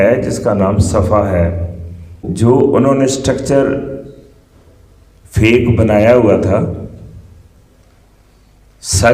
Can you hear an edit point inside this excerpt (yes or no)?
yes